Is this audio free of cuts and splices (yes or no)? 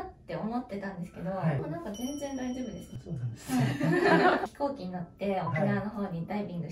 no